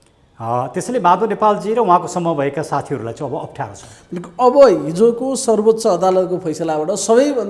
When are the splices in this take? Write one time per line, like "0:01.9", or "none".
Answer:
none